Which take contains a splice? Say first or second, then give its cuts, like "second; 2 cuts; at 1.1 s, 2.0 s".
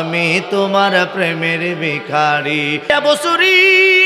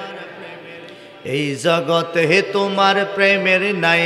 first; 1 cut; at 2.9 s